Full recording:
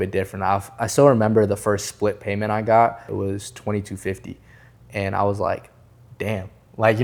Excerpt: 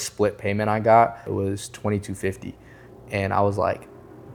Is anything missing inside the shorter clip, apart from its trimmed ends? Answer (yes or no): no